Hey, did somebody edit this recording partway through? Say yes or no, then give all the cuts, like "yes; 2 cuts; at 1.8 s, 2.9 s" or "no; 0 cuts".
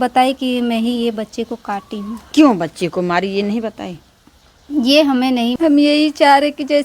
yes; 1 cut; at 5.6 s